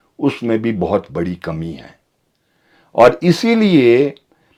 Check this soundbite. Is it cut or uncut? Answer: uncut